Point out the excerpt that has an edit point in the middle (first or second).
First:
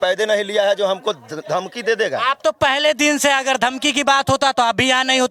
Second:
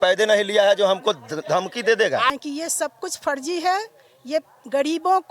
second